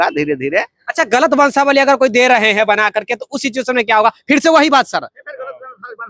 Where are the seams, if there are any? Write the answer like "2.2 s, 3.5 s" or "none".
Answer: none